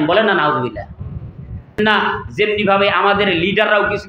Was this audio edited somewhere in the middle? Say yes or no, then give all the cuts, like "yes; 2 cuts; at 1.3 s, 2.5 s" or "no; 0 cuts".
yes; 1 cut; at 1.8 s